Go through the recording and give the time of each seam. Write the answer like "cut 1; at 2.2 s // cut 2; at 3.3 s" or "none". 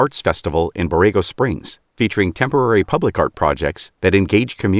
none